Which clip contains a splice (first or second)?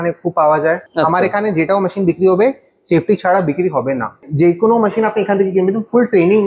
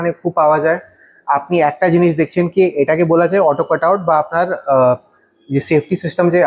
first